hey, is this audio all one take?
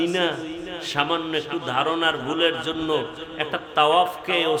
yes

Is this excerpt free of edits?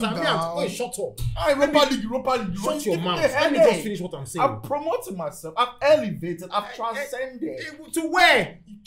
yes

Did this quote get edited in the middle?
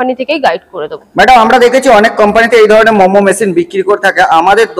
no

